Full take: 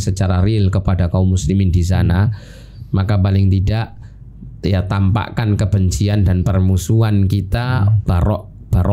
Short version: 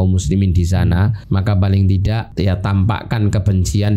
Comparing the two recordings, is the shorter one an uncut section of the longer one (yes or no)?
no